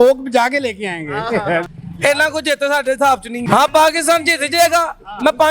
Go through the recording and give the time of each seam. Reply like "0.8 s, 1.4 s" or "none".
1.7 s, 3.3 s